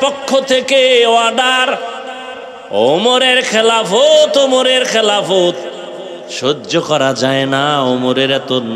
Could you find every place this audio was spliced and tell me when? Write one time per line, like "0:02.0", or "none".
none